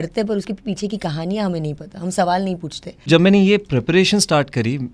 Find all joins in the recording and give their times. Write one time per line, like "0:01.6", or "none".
0:03.1